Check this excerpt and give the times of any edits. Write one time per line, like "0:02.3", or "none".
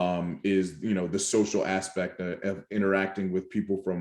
none